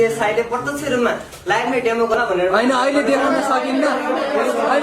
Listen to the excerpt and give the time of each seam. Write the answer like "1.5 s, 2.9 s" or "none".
2.1 s